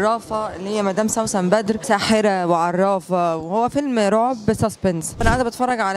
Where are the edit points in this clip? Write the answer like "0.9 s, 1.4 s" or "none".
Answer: 1.8 s, 5.2 s